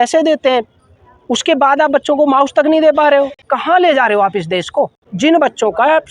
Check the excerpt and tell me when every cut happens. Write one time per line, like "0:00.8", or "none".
0:03.5
0:05.0